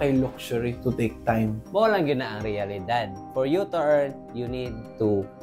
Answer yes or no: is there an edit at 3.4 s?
no